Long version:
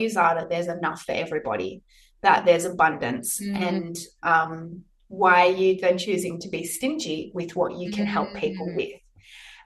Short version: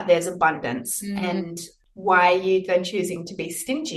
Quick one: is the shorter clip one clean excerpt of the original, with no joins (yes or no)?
no